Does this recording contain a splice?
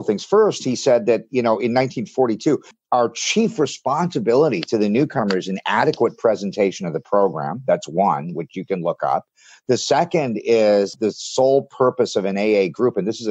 yes; 2 cuts; at 2.7 s, 10.9 s

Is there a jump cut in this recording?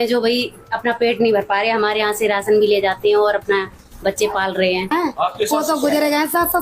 yes; 1 cut; at 4.9 s

